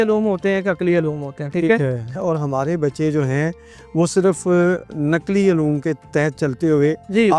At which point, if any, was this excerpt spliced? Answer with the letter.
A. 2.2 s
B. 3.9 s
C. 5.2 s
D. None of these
A